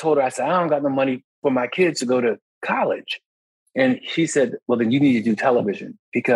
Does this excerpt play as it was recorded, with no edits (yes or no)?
no